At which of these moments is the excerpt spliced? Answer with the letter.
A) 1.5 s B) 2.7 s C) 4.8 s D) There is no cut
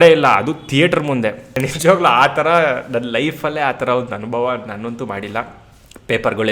A